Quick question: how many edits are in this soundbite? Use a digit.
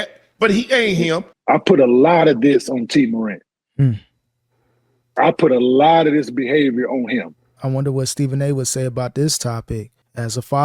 2